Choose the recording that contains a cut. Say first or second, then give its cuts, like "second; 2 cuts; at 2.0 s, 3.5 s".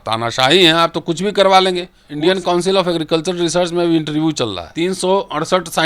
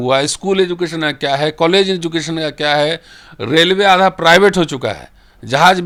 first; 2 cuts; at 2.0 s, 4.6 s